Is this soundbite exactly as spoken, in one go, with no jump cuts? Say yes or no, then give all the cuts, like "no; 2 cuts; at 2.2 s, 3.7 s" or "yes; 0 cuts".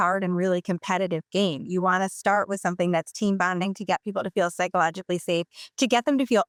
yes; 0 cuts